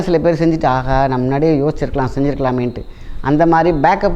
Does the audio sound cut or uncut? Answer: uncut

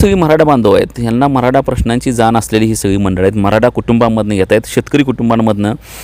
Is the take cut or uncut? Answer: uncut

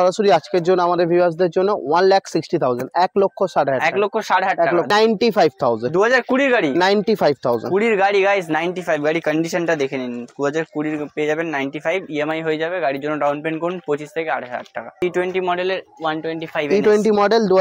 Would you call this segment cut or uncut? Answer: cut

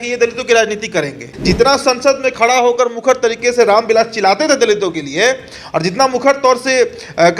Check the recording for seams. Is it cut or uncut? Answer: cut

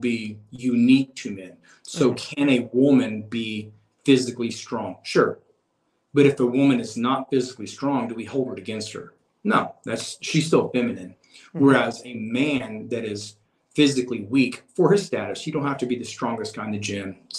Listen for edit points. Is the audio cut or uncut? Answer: uncut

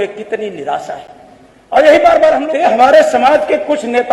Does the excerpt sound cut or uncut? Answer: cut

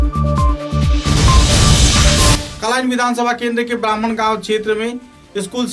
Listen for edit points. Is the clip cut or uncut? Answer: cut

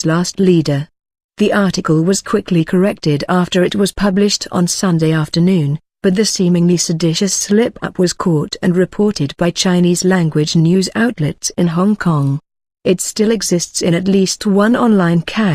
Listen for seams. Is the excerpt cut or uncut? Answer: uncut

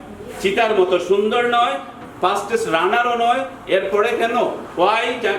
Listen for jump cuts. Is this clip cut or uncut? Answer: uncut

